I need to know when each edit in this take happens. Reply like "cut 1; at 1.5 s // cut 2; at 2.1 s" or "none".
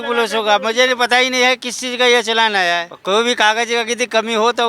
cut 1; at 2.9 s